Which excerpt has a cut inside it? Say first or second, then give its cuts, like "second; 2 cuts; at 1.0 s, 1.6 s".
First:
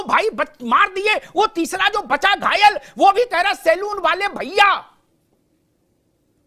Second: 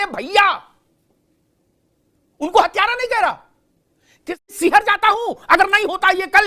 second; 1 cut; at 4.5 s